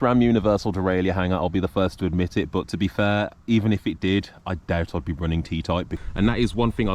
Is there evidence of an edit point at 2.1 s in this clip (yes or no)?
no